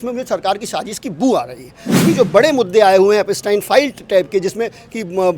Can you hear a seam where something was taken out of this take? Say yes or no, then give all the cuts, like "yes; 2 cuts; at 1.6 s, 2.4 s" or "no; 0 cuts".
yes; 1 cut; at 2.0 s